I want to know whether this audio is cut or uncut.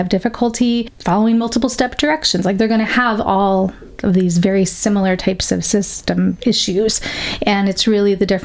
cut